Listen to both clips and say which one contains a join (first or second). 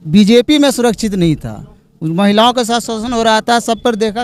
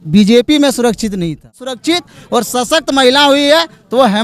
second